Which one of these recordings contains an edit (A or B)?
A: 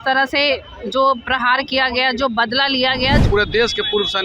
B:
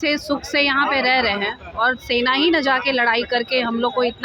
A